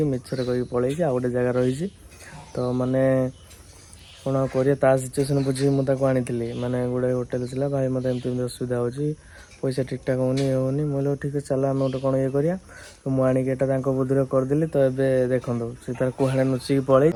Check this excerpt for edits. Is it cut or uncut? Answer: uncut